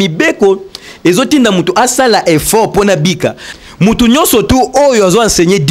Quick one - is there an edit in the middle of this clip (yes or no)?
yes